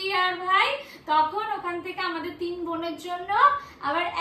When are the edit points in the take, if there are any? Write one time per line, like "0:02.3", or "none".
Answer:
none